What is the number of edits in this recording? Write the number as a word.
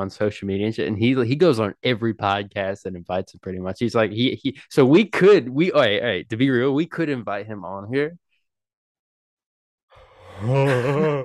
zero